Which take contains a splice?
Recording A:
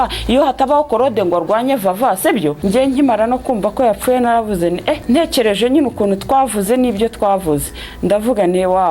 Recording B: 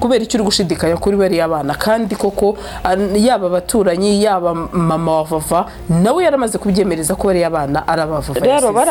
A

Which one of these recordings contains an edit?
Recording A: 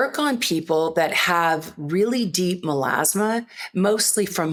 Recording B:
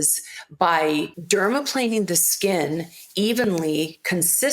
B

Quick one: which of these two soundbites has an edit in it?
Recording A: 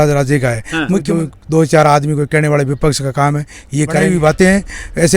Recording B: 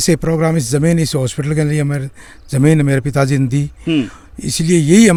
A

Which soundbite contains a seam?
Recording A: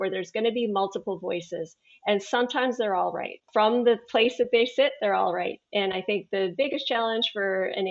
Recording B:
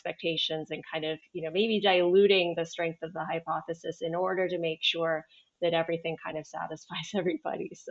A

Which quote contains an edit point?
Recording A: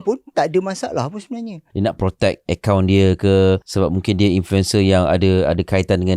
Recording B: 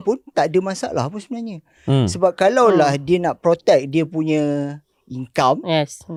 A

